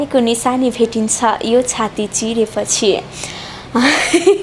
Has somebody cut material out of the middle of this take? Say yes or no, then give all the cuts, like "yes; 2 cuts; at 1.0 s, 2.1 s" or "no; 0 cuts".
no; 0 cuts